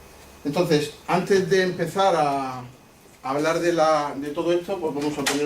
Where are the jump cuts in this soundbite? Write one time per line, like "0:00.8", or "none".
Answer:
0:04.2